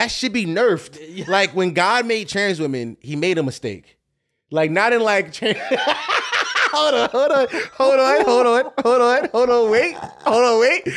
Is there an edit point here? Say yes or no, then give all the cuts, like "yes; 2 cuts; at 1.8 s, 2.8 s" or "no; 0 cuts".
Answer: no; 0 cuts